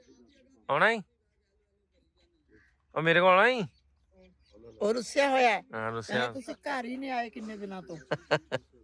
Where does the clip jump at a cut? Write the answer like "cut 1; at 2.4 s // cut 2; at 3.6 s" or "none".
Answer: none